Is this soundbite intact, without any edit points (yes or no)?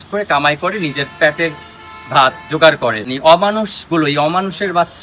no